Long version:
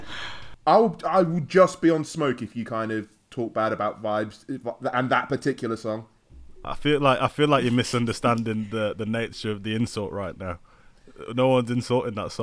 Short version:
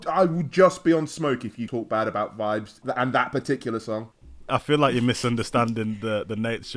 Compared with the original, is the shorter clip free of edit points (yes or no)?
no